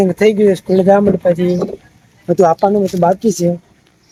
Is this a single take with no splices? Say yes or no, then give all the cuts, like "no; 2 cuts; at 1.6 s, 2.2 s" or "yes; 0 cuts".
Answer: yes; 0 cuts